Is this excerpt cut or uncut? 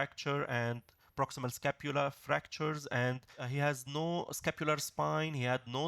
cut